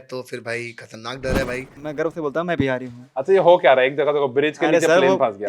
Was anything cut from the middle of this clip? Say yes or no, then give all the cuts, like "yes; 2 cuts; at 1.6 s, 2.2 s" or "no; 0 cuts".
yes; 1 cut; at 1.8 s